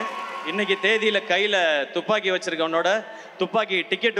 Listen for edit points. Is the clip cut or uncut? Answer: uncut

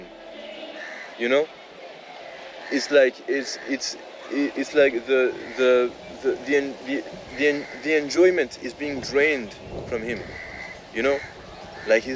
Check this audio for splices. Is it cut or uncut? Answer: uncut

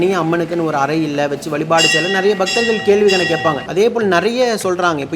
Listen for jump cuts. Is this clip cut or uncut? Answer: cut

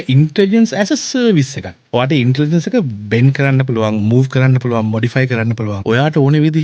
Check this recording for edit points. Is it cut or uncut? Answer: cut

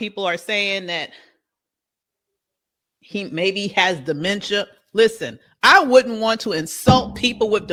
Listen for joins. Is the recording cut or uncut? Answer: uncut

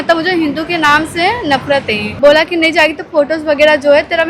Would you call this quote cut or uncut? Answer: cut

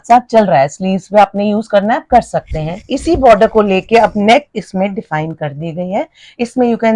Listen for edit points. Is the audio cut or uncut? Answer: uncut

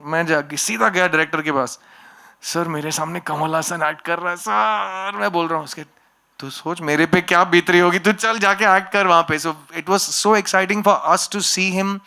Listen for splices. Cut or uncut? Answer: uncut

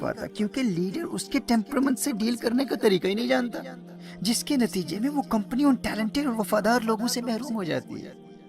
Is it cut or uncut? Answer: uncut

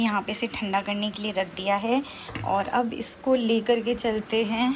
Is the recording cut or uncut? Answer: uncut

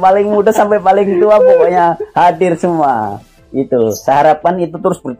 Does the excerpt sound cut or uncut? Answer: uncut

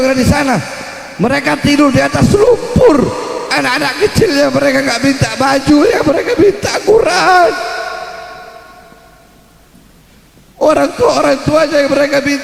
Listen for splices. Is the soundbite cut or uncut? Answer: uncut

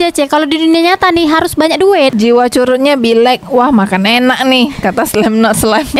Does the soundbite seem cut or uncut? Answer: cut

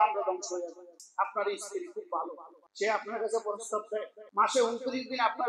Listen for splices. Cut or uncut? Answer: cut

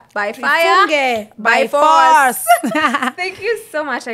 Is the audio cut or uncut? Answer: uncut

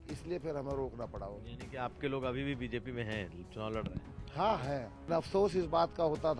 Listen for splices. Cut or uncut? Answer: cut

